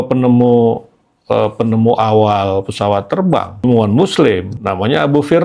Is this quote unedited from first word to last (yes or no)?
no